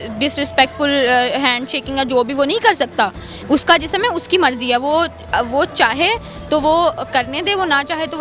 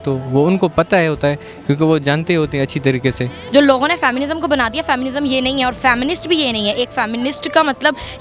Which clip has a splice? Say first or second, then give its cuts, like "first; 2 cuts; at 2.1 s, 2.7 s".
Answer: second; 1 cut; at 3.4 s